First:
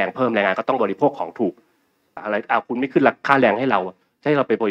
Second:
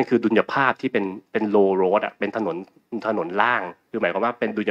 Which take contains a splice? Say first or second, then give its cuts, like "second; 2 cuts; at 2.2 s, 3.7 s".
first; 1 cut; at 2.2 s